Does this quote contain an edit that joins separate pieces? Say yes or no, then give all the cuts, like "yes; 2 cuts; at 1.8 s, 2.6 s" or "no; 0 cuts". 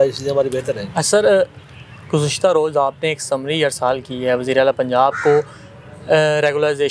no; 0 cuts